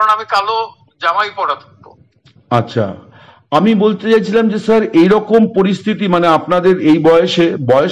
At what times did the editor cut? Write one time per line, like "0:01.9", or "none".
none

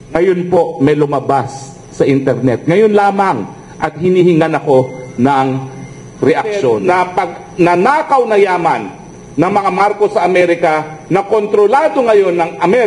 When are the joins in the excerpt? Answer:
0:06.8

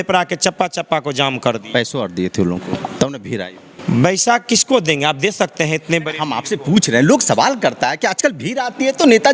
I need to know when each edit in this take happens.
none

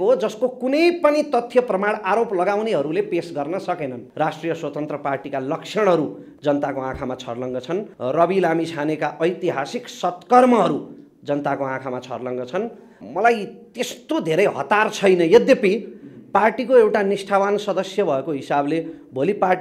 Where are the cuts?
0:04.0
0:07.9
0:13.0

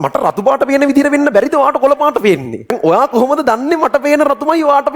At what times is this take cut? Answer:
0:02.7

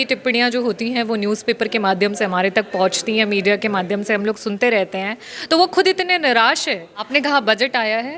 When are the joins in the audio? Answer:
0:07.1

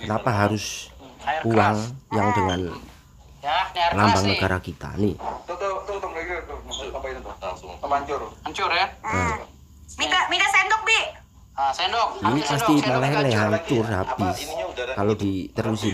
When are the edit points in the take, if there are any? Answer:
none

